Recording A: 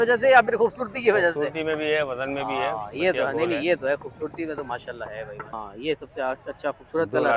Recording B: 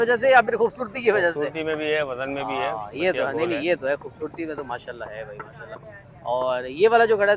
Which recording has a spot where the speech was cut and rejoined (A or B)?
A